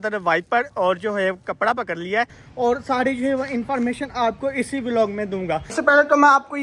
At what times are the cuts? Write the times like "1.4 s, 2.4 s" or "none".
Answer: 2.4 s, 5.7 s